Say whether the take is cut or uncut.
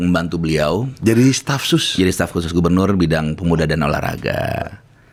uncut